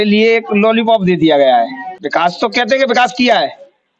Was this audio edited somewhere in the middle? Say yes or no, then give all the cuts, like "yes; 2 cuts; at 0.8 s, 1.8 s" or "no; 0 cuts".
no; 0 cuts